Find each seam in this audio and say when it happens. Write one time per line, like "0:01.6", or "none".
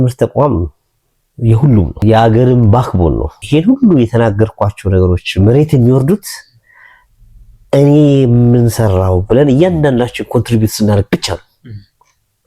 0:02.0
0:03.4

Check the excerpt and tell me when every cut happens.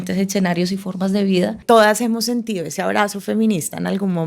0:01.6

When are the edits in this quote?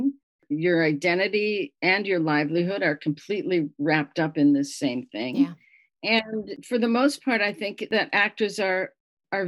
none

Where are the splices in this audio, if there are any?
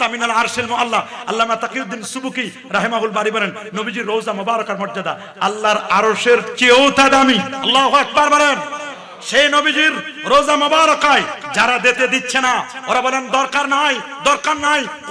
0:07.6

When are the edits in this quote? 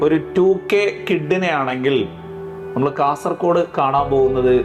none

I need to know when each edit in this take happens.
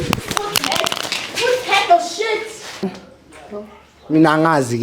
0:02.8

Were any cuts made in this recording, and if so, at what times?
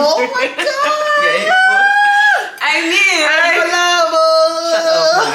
none

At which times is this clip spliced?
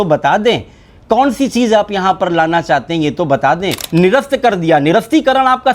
0:03.8

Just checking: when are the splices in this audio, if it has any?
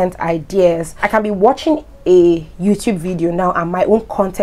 0:00.9

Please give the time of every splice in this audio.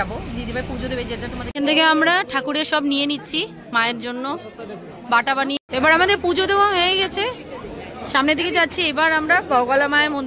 0:01.5
0:05.6

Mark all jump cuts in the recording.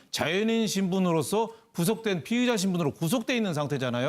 0:01.3

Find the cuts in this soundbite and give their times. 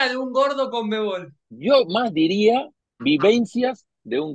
0:01.5

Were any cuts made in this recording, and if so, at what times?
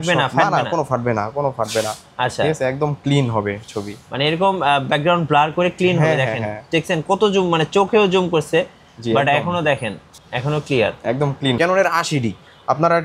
0:11.6

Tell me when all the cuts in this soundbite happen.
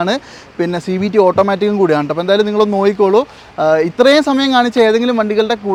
none

